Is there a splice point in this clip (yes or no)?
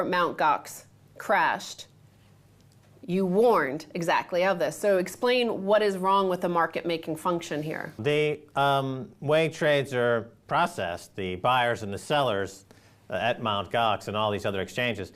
yes